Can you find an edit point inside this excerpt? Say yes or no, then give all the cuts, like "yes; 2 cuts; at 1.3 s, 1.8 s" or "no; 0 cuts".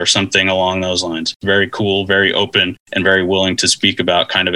yes; 2 cuts; at 1.4 s, 2.8 s